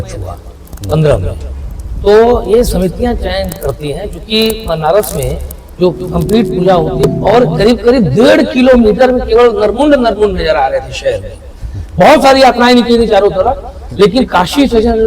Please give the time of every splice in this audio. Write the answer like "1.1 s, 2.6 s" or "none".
7.2 s